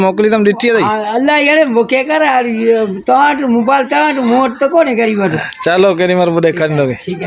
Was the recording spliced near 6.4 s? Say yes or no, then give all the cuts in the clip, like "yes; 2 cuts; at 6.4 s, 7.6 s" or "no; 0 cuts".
no; 1 cut; at 1.0 s